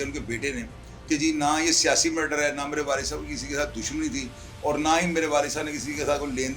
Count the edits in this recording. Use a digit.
0